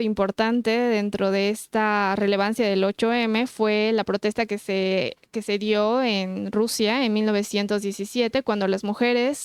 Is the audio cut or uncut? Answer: uncut